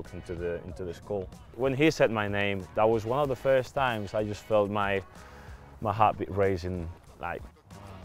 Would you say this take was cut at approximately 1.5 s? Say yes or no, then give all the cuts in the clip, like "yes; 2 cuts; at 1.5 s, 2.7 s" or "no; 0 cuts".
yes; 1 cut; at 1.5 s